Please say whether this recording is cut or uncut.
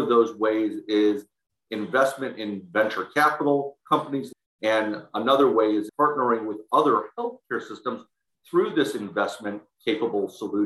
cut